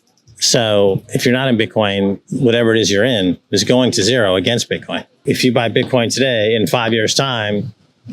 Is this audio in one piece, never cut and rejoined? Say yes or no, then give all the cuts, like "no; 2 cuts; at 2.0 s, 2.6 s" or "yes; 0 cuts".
no; 1 cut; at 5.2 s